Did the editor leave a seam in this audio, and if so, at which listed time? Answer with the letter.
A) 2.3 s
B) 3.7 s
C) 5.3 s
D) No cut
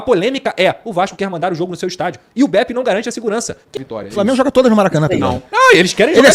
B